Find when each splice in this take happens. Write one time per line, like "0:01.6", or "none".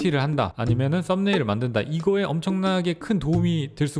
none